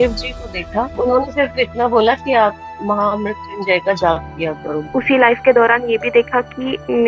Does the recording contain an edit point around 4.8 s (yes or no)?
yes